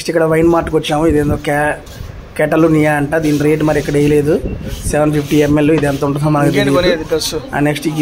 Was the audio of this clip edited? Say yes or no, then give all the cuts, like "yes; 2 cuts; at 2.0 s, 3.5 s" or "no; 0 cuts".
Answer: no; 0 cuts